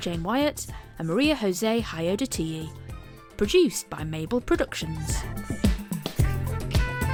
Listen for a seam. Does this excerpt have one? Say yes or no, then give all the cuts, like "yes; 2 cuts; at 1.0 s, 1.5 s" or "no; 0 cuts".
no; 0 cuts